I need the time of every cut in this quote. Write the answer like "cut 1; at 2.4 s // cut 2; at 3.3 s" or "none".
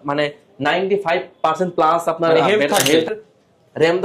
cut 1; at 3.1 s